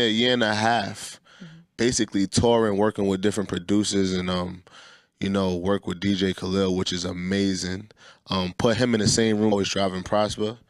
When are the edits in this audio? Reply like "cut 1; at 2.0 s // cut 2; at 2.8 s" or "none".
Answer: none